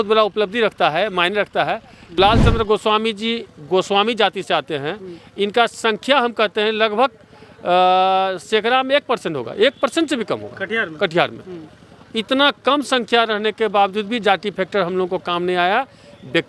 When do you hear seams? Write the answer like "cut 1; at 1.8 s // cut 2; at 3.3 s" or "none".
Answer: cut 1; at 2.2 s